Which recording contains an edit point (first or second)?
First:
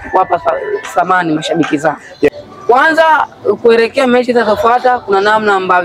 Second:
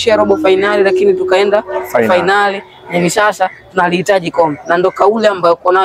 first